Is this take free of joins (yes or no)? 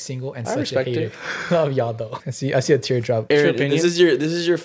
no